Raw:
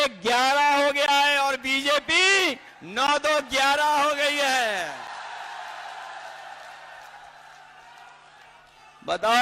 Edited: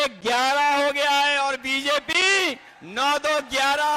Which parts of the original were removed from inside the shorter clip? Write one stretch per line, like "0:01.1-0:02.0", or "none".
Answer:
none

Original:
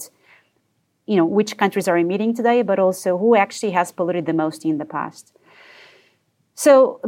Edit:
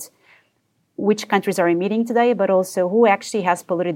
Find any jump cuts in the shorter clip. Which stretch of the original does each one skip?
0:01.0-0:01.3

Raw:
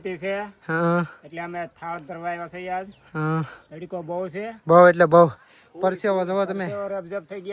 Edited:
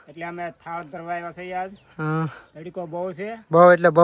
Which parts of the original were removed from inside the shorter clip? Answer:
none

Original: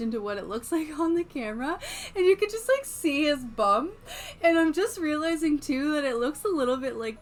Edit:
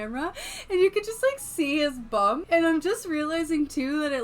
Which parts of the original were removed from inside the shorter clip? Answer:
0:03.9-0:04.3

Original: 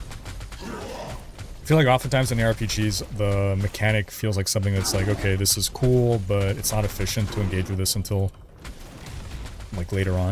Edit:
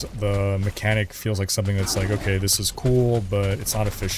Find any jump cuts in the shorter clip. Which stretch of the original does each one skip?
none

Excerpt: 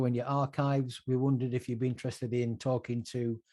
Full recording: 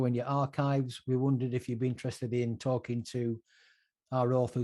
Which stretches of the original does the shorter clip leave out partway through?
none

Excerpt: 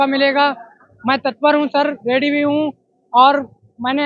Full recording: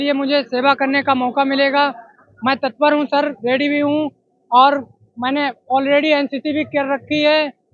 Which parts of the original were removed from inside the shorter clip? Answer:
none

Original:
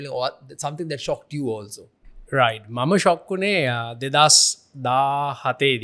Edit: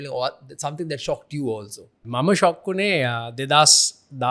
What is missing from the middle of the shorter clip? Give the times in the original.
0:02.0-0:02.6

